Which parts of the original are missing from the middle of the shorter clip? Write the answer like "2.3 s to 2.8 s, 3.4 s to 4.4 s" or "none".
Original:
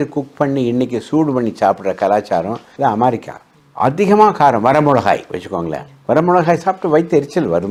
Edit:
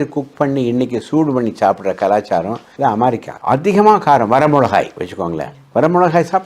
3.3 s to 3.6 s